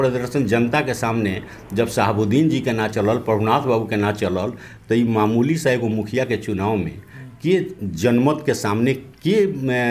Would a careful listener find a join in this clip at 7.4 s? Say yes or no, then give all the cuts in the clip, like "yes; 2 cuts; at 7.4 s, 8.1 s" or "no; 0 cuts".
no; 0 cuts